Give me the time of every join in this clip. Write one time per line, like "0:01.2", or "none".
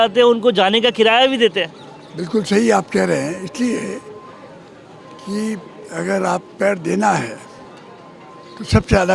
none